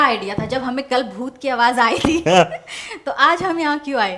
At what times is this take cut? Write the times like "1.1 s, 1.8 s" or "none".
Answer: none